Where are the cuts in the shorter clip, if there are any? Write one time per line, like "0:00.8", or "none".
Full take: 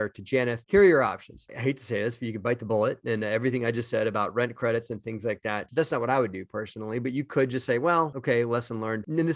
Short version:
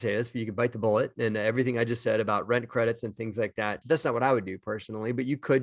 none